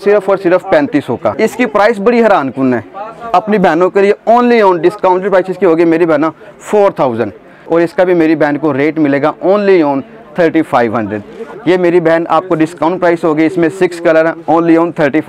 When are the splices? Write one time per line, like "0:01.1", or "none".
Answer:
0:01.3
0:07.5
0:11.4